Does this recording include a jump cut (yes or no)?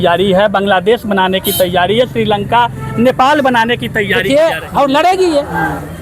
yes